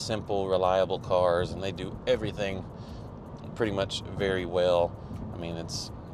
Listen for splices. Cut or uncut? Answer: uncut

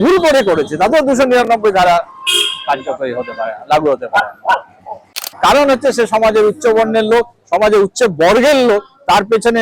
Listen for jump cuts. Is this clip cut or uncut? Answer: cut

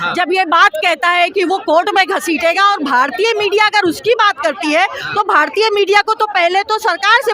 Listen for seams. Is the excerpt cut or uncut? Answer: uncut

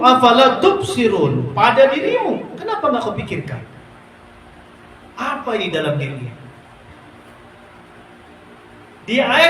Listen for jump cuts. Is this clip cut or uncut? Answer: uncut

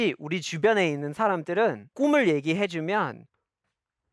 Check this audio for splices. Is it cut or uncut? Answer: cut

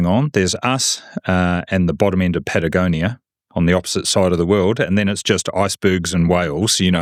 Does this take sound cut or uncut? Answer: uncut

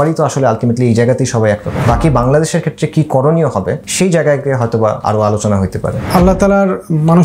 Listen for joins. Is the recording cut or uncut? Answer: cut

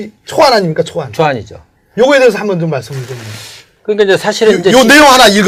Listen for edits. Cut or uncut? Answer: uncut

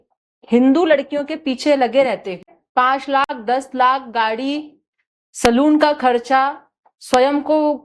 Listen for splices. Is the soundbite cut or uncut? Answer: cut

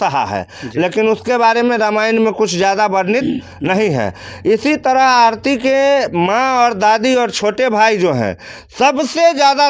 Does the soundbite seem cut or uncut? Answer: uncut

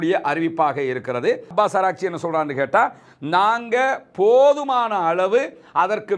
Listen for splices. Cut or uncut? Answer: cut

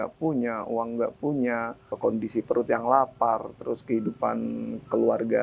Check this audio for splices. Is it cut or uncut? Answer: cut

